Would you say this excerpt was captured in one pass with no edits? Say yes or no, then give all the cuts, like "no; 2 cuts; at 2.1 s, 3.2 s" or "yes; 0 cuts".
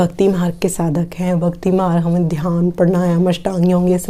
yes; 0 cuts